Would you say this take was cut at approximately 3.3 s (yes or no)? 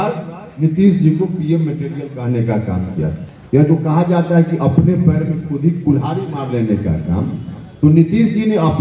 yes